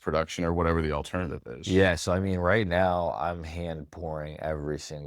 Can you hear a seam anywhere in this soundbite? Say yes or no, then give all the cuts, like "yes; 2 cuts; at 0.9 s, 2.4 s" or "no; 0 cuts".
no; 0 cuts